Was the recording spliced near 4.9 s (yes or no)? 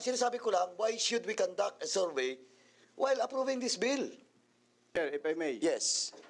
yes